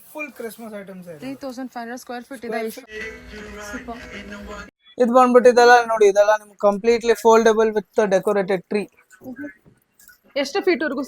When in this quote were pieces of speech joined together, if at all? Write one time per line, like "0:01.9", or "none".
0:02.8
0:04.8